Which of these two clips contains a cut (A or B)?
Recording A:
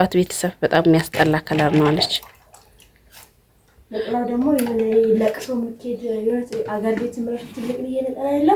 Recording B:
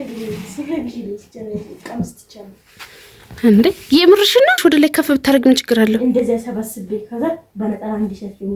B